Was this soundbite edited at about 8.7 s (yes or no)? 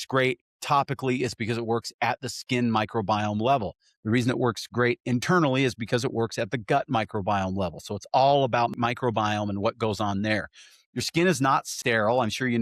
yes